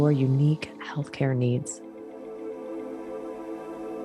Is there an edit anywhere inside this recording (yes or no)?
yes